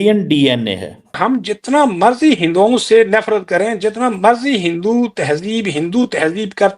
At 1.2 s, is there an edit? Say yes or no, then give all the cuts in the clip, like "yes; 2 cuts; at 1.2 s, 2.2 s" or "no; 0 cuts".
yes; 1 cut; at 1.2 s